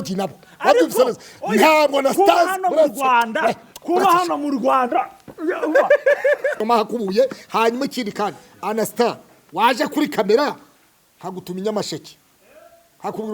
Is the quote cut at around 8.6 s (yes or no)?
no